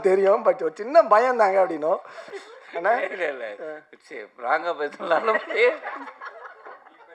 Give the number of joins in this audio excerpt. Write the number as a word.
one